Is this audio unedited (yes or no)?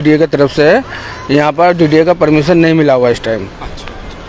yes